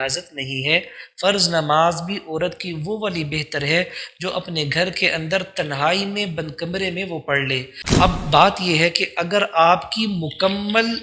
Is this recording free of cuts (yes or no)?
no